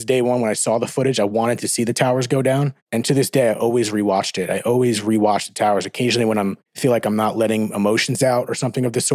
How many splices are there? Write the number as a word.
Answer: three